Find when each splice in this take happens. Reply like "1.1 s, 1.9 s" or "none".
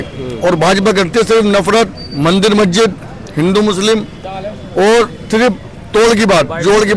none